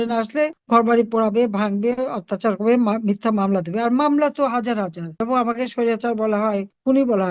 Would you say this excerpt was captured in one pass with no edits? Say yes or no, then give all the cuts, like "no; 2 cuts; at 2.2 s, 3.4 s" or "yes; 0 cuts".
no; 1 cut; at 5.1 s